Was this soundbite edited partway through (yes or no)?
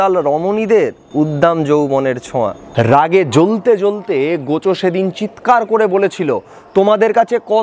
yes